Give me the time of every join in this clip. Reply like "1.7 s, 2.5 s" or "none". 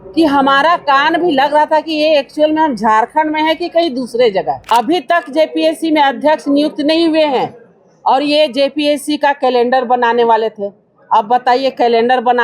4.6 s